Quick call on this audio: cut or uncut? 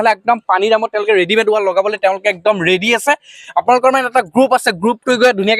uncut